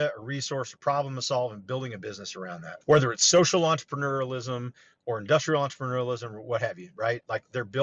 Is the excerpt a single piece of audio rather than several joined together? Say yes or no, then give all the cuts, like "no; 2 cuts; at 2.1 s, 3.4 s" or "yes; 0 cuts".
no; 1 cut; at 2.7 s